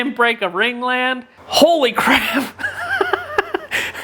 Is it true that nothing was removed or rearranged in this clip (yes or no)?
no